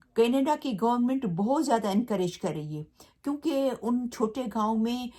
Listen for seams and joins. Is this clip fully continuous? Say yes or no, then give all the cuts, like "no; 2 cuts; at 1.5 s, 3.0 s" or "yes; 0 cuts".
yes; 0 cuts